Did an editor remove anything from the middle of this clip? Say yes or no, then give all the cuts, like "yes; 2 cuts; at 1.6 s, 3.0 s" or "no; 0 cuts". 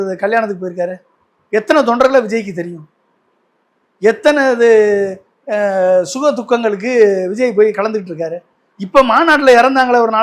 no; 0 cuts